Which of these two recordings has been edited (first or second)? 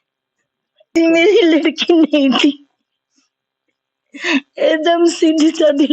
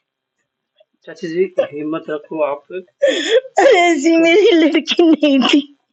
first